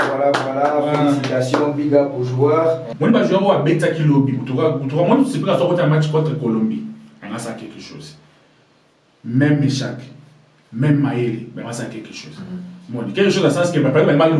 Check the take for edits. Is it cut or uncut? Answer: cut